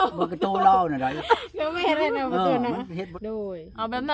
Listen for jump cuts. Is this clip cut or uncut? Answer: cut